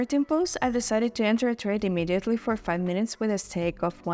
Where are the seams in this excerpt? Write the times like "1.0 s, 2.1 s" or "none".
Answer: none